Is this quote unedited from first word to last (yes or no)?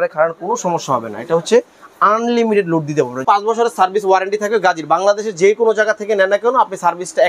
no